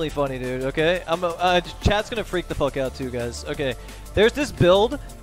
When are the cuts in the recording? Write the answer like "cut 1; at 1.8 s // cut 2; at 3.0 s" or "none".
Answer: none